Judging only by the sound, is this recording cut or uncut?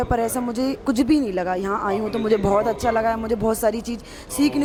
uncut